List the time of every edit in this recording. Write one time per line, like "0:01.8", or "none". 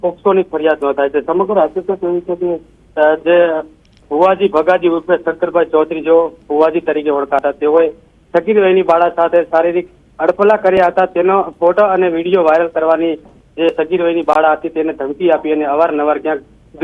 none

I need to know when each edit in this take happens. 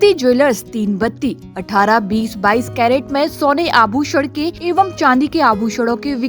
0:04.6

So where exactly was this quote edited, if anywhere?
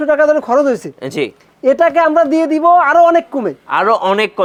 none

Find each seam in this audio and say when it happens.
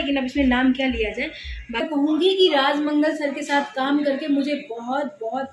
0:01.8

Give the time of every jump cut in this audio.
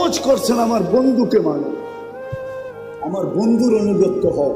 0:01.8
0:03.0

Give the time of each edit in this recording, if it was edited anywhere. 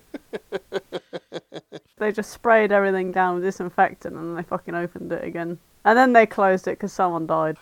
0:01.5
0:05.7

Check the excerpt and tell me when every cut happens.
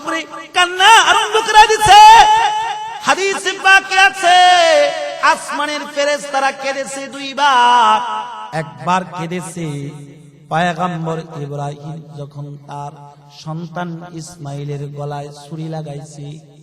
0:02.9
0:08.4

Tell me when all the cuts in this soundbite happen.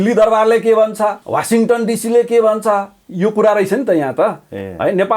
0:01.2

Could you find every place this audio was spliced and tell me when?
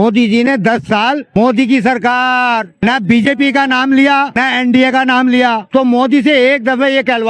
0:01.4
0:02.7
0:04.4
0:05.6

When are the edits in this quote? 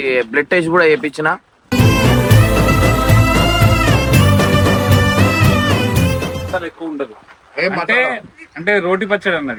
none

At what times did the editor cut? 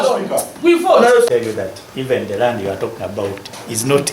0:01.3

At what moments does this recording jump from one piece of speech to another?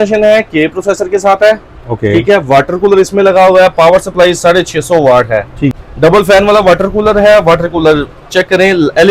0:05.7

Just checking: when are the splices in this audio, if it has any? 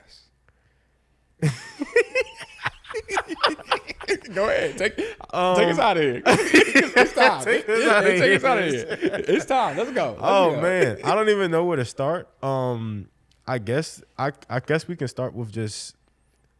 none

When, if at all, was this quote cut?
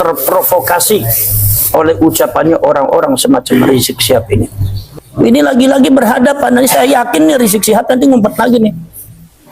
0:04.8

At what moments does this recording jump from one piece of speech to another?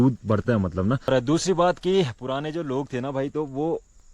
0:01.1

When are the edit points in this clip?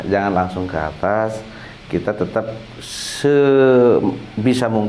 none

